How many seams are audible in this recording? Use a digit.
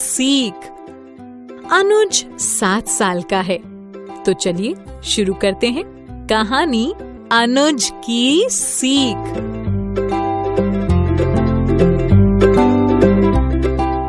2